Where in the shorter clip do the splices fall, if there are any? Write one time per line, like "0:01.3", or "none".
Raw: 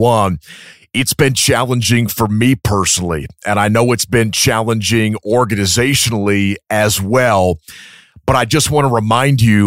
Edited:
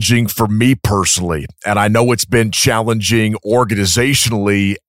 none

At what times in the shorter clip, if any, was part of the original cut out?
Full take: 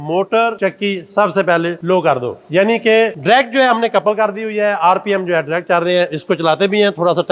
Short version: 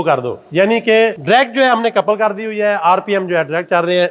none

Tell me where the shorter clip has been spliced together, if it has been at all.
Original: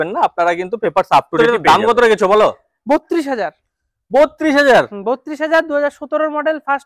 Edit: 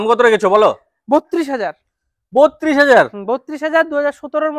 none

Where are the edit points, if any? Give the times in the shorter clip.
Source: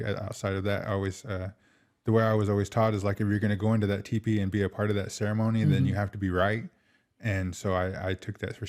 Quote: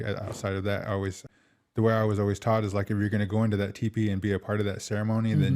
0:01.3

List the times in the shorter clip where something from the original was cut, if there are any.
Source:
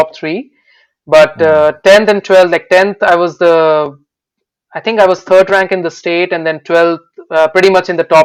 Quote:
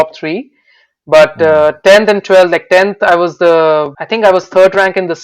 0:04.0

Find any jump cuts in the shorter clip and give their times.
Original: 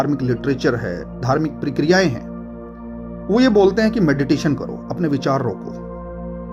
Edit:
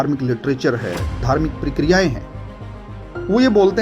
none

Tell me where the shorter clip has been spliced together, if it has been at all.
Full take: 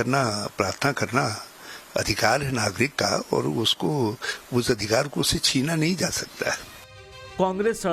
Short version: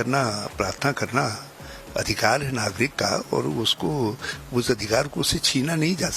none

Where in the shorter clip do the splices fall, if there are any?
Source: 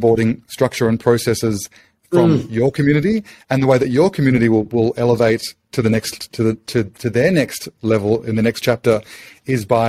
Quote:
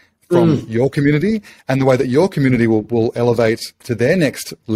0:03.8

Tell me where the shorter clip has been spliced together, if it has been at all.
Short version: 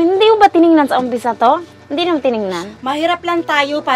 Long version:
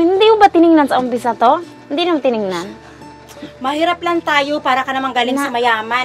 0:02.7

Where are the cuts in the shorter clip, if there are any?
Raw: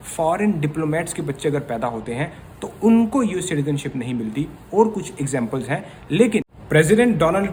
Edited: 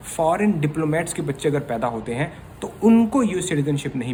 none

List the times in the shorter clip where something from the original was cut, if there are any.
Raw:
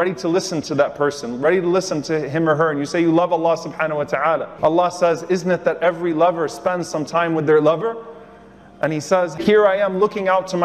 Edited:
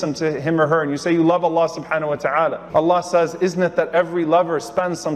none

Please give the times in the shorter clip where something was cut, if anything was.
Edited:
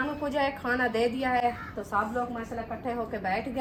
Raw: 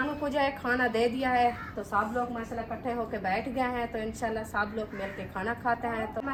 none

